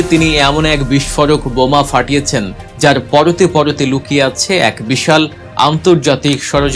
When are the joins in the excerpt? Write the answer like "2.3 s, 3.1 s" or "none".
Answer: 2.6 s